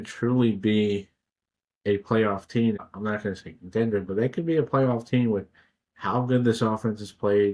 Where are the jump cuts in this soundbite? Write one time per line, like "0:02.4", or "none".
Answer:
0:02.8